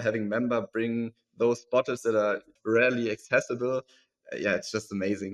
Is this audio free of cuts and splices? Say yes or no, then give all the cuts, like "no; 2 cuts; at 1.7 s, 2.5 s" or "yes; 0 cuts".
no; 1 cut; at 2.5 s